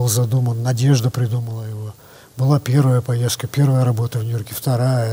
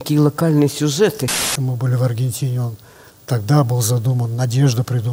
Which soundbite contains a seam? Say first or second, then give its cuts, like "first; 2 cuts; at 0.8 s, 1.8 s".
second; 1 cut; at 1.6 s